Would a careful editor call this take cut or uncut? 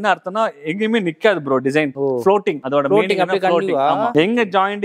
uncut